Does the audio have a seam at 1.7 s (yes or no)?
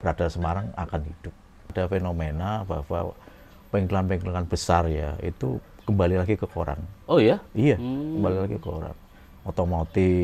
yes